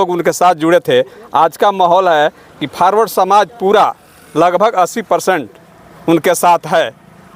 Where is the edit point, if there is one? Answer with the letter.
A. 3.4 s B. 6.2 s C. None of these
C